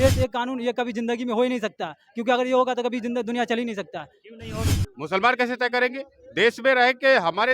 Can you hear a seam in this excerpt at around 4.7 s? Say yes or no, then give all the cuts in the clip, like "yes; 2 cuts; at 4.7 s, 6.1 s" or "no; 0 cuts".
yes; 1 cut; at 4.7 s